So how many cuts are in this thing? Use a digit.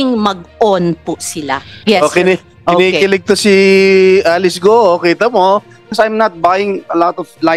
2